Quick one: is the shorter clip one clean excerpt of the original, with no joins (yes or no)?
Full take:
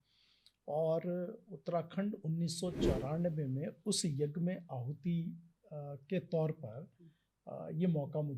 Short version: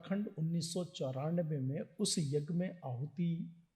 yes